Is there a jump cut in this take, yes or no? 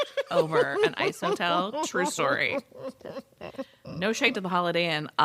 no